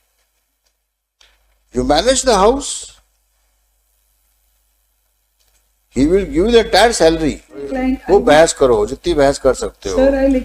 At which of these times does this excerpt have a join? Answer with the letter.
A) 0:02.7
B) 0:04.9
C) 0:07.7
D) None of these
C